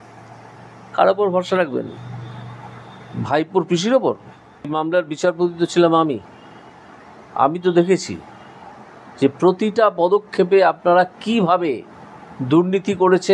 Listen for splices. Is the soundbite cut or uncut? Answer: cut